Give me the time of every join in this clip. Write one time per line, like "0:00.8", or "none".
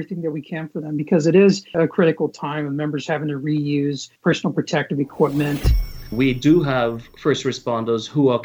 0:05.9